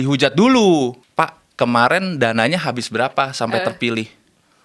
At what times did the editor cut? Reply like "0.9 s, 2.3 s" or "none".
1.0 s